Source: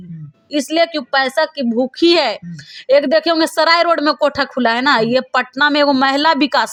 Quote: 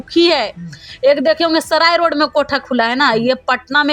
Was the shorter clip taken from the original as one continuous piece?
yes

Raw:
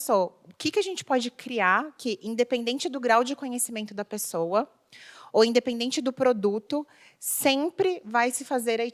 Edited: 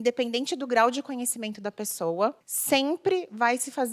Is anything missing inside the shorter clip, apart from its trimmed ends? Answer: yes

